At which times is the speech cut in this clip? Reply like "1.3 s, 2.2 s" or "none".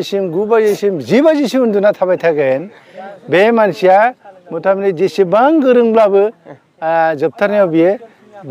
none